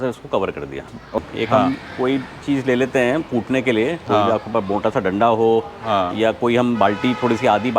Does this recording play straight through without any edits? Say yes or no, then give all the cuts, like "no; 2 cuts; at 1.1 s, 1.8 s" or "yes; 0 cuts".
no; 1 cut; at 1.2 s